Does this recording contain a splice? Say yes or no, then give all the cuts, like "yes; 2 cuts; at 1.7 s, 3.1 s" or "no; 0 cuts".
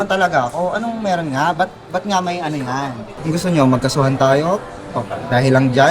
yes; 1 cut; at 3.1 s